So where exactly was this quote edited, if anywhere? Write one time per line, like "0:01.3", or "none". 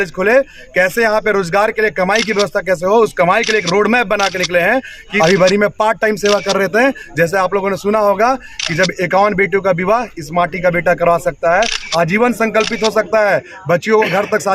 0:05.1